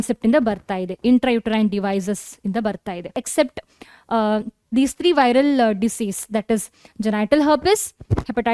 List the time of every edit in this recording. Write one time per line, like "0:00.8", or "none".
0:03.2

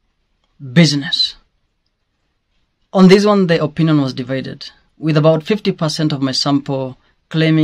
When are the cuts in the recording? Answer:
none

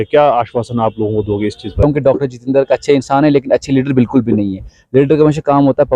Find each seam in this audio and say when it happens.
0:01.8

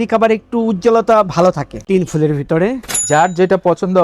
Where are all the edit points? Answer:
0:01.8
0:03.0

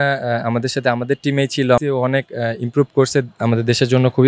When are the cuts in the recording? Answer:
0:01.8

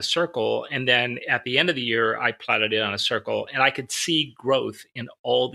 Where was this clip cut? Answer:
none

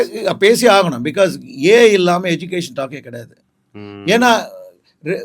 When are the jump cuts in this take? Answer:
none

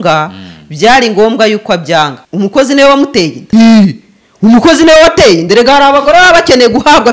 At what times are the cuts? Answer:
0:02.2
0:03.4

